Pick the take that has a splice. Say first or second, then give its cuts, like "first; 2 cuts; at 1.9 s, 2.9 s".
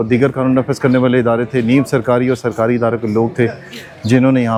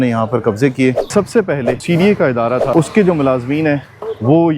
second; 2 cuts; at 1.3 s, 2.7 s